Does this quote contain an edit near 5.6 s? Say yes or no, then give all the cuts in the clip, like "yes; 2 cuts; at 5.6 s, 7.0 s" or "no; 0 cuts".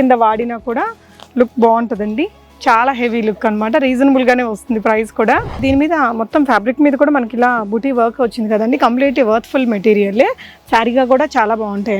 yes; 1 cut; at 5.6 s